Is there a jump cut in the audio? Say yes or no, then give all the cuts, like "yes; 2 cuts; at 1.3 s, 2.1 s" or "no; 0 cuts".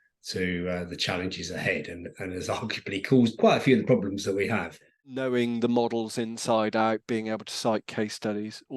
yes; 1 cut; at 5.1 s